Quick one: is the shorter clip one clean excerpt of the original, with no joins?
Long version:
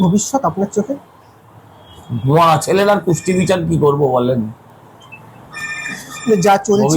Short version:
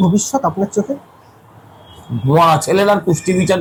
yes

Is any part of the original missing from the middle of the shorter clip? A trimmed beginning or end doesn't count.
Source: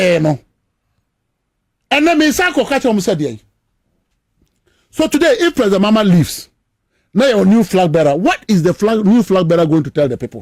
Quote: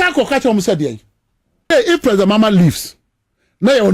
yes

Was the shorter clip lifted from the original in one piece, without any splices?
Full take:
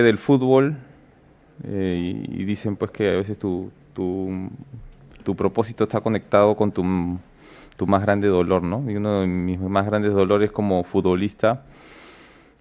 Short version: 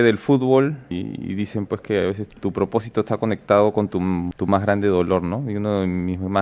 no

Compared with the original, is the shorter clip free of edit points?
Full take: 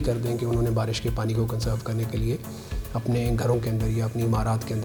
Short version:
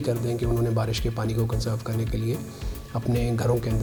yes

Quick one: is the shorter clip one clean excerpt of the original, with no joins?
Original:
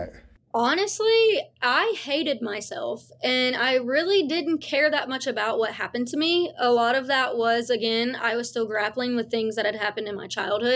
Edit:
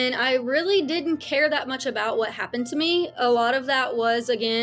yes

